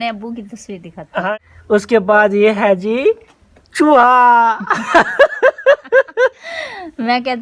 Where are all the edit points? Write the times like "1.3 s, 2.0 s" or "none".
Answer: 1.2 s